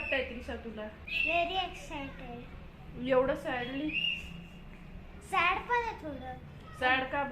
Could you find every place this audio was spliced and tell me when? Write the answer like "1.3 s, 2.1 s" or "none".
1.1 s